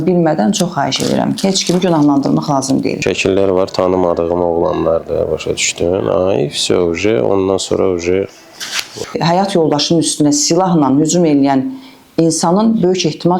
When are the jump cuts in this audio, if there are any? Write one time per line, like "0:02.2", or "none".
0:03.0
0:09.2